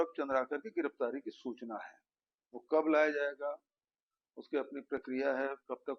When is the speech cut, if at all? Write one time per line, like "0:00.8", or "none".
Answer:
none